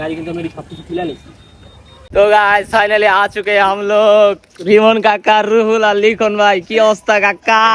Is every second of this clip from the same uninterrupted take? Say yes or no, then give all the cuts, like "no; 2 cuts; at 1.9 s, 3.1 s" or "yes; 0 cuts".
no; 1 cut; at 2.1 s